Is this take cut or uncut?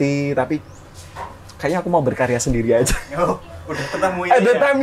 uncut